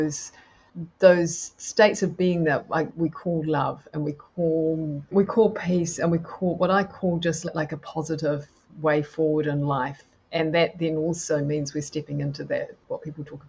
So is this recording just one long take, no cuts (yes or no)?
no